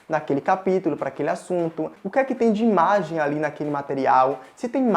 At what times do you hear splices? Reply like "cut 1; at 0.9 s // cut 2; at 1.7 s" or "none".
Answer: cut 1; at 2.0 s